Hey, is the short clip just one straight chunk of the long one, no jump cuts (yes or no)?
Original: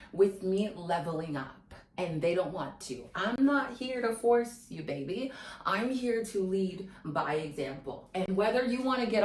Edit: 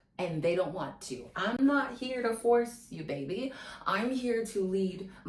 yes